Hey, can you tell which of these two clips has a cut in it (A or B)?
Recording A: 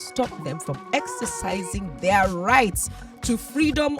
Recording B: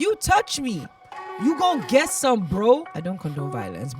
B